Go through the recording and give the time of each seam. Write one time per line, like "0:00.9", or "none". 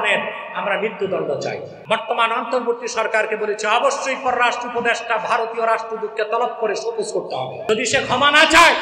0:01.7
0:07.7

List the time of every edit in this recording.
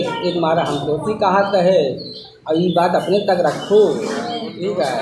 none

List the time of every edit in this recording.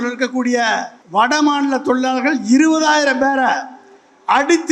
0:01.0

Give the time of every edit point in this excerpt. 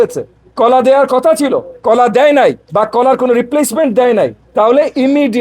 0:01.7
0:02.6
0:04.4

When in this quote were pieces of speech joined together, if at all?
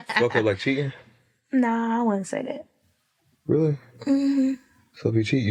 none

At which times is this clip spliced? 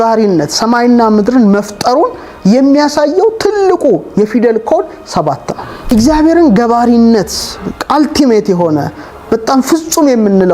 0:05.9

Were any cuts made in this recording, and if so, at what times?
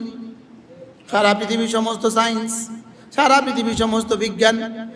none

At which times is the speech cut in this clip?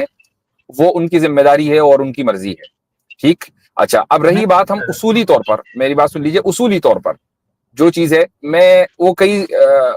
none

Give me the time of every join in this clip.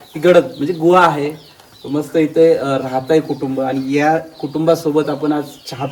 none

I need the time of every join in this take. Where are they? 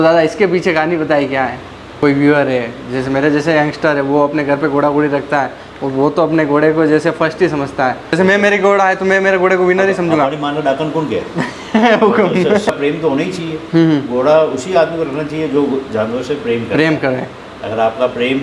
0:01.9
0:08.1
0:12.7

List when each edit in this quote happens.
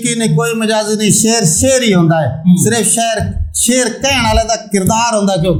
none

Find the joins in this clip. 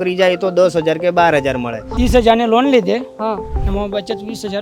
0:01.8

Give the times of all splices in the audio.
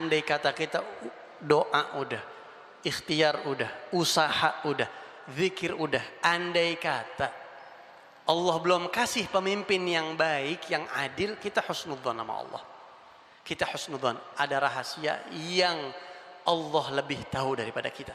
none

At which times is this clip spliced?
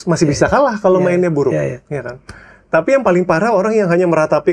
none

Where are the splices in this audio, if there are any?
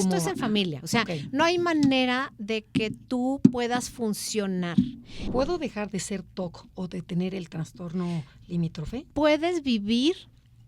0:05.2
0:09.0

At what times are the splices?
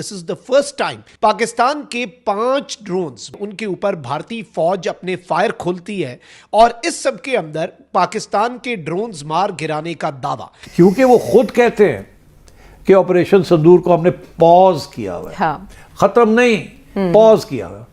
0:01.0
0:03.4
0:10.6

